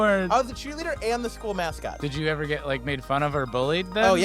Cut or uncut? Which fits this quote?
cut